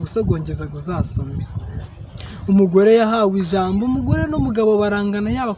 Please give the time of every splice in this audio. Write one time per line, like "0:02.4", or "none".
0:01.8